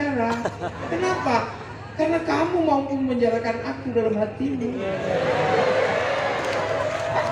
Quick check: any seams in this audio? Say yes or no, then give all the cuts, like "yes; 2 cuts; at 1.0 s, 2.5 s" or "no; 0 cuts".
no; 0 cuts